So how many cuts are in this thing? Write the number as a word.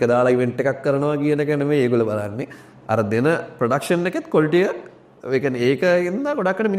zero